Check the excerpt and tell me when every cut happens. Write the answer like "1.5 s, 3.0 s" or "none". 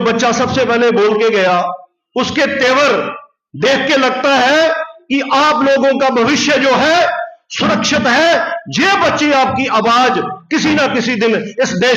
none